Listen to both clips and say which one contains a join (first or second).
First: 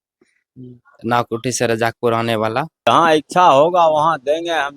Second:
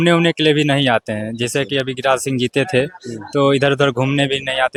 first